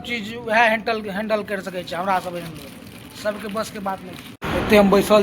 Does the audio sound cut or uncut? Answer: cut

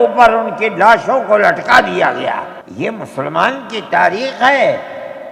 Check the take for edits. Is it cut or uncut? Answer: uncut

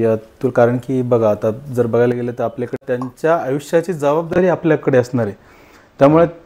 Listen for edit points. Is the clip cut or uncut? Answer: cut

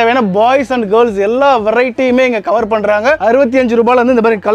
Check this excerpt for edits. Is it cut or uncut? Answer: uncut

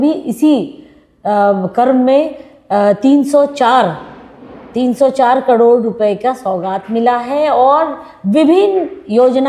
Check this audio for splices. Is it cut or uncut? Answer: uncut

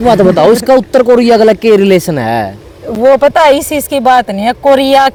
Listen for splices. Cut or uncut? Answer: uncut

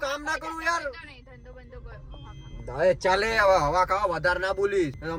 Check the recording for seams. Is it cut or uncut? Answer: uncut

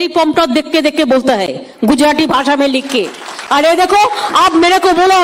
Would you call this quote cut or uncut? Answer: uncut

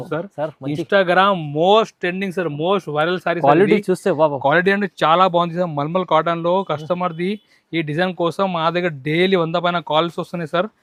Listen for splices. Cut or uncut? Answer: uncut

